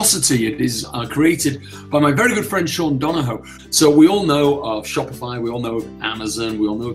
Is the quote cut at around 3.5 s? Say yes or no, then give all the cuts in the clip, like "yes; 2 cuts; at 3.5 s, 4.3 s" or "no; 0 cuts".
yes; 1 cut; at 3.5 s